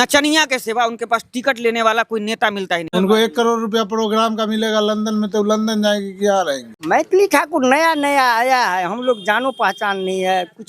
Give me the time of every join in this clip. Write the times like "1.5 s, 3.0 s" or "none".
2.9 s, 6.7 s